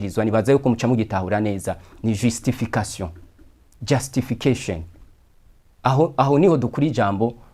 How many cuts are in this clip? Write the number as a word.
zero